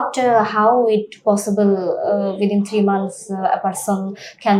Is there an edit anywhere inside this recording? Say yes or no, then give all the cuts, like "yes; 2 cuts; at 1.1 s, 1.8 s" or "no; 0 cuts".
no; 0 cuts